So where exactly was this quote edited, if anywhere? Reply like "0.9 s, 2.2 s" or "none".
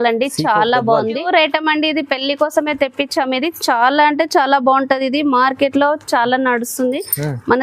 1.3 s